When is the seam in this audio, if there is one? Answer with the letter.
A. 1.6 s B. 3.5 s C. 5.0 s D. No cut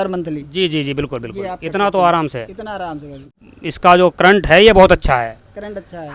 B